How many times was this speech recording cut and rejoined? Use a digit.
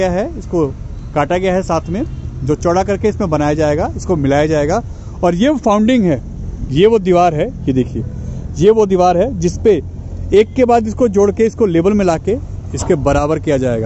0